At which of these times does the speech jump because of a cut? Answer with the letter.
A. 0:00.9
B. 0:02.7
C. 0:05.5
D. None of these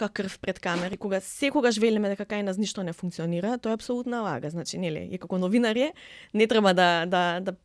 A